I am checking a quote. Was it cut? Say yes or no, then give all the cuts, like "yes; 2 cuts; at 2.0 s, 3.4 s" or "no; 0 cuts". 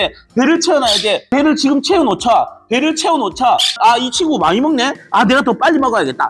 no; 0 cuts